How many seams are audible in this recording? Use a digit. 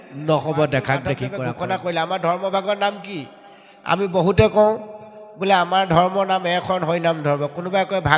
1